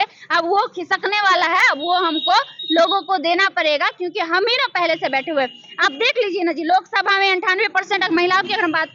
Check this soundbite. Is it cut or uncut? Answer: uncut